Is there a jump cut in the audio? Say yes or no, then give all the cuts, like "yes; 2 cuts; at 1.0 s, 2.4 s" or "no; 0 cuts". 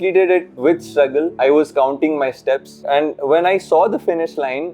yes; 2 cuts; at 1.4 s, 2.8 s